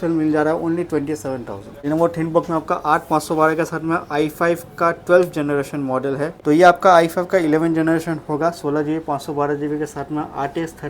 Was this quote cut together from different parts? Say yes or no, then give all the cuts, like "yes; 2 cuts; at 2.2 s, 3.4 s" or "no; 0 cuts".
yes; 2 cuts; at 1.7 s, 6.4 s